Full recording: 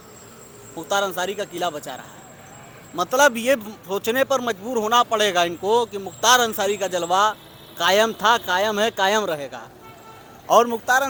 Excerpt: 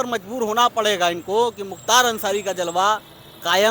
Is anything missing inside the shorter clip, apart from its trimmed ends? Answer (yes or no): no